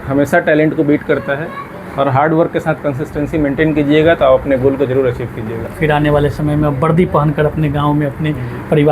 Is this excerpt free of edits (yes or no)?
no